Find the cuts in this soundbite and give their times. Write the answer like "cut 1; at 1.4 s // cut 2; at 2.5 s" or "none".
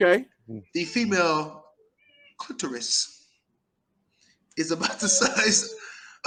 none